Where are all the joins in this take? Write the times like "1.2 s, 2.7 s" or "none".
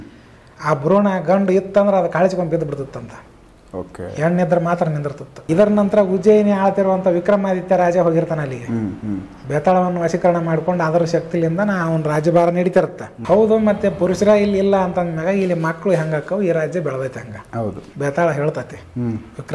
5.3 s, 13.1 s, 17.8 s